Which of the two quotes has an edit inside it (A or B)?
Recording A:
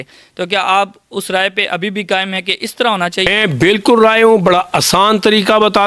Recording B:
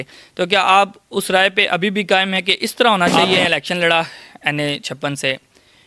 B